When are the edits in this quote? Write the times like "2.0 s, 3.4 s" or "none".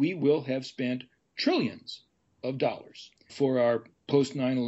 3.3 s